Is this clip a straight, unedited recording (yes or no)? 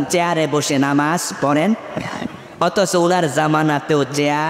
yes